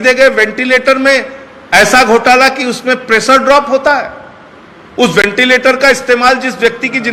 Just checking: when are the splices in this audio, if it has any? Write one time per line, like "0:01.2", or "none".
none